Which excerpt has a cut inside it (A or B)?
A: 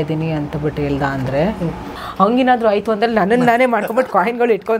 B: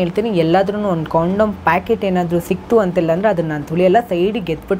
A